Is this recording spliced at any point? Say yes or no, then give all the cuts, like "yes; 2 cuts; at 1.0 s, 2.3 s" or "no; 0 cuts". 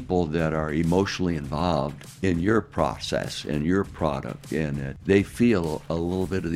yes; 2 cuts; at 2.0 s, 4.9 s